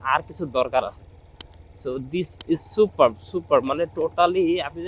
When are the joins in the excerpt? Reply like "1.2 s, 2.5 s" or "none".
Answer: none